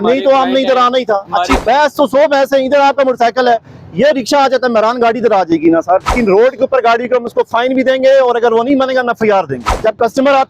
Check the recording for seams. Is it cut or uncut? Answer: cut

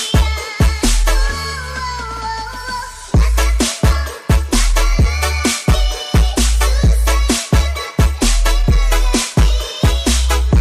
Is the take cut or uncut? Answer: cut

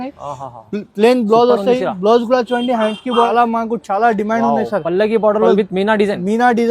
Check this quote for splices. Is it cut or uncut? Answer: cut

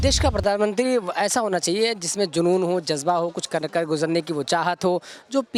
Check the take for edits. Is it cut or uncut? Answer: uncut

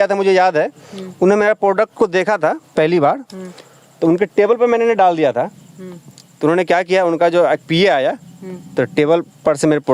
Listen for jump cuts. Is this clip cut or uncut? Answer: uncut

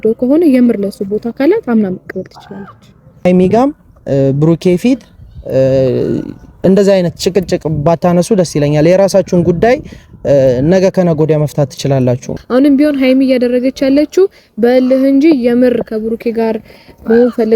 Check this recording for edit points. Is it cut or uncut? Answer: cut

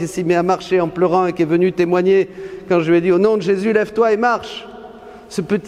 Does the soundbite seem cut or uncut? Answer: uncut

